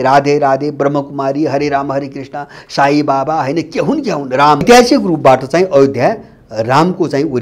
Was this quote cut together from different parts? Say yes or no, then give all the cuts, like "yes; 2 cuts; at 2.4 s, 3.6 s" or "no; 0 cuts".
yes; 1 cut; at 4.6 s